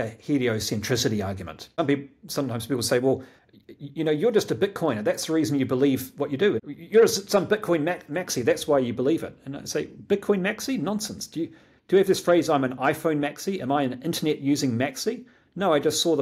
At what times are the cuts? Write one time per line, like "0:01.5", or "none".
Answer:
0:01.6
0:06.7